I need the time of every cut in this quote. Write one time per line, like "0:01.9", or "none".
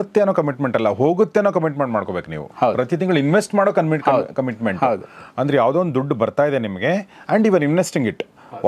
none